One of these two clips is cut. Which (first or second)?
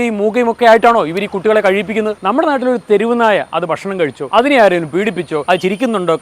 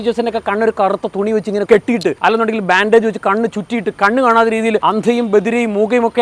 first